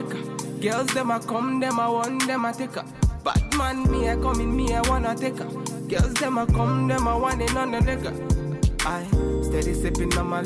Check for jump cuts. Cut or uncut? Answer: uncut